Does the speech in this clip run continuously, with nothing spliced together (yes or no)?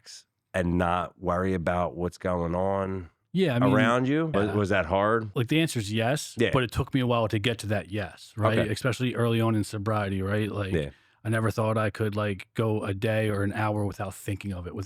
no